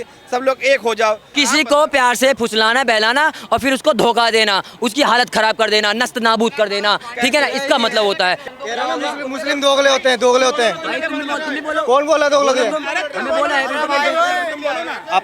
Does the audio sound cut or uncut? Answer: cut